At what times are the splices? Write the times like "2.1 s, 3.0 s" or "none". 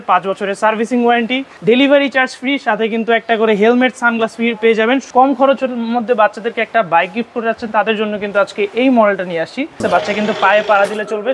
1.5 s, 5.1 s, 9.8 s